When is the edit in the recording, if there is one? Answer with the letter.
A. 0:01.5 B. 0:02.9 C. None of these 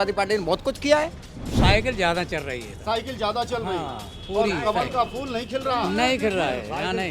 A